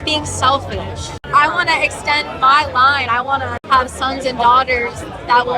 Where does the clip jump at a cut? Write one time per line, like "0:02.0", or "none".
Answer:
0:01.2
0:03.6